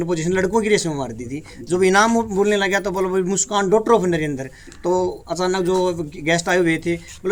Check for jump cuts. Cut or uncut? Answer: uncut